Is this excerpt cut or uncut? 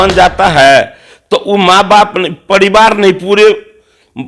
uncut